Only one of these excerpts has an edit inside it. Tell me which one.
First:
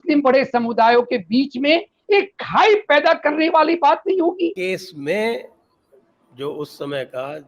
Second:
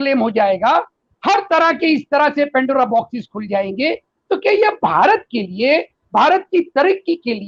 first; 1 cut; at 4.6 s

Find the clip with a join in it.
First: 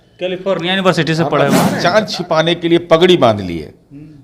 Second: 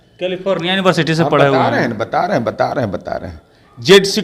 first; 1 cut; at 1.7 s

